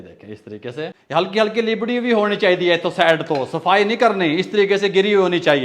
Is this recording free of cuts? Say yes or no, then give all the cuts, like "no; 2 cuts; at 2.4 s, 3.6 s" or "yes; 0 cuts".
no; 1 cut; at 1.0 s